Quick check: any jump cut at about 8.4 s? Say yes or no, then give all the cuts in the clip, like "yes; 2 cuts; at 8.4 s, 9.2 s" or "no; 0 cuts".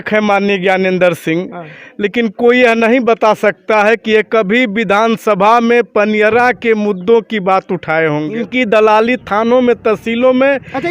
yes; 1 cut; at 8.4 s